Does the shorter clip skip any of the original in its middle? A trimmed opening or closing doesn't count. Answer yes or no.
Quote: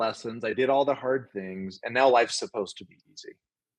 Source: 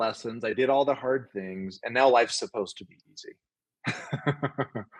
no